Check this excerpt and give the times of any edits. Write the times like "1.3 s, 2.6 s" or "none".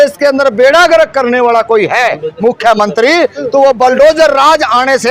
none